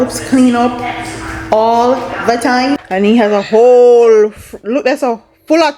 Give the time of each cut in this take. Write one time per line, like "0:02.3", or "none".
0:02.7